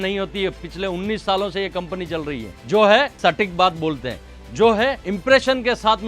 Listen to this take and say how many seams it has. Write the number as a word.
three